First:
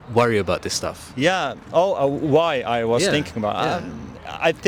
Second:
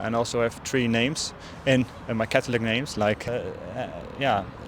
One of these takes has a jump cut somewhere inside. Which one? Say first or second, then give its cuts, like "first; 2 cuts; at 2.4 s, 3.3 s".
second; 1 cut; at 3.3 s